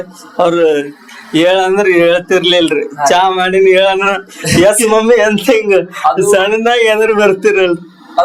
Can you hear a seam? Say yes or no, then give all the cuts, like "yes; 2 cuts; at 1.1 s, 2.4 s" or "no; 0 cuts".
no; 0 cuts